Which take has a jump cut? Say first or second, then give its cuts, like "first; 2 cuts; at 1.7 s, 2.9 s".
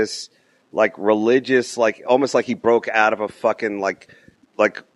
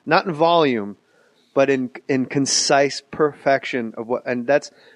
first; 1 cut; at 3.4 s